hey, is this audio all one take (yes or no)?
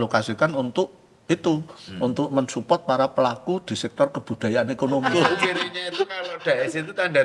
no